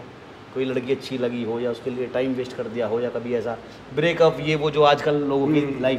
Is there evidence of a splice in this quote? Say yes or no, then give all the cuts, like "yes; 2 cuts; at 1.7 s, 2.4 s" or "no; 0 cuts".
no; 0 cuts